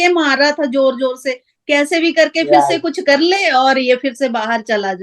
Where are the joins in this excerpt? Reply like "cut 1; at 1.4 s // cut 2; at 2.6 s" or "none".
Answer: none